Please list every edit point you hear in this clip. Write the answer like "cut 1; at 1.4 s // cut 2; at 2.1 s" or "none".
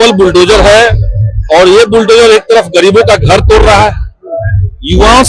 none